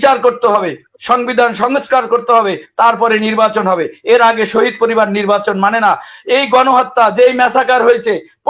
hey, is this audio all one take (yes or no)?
yes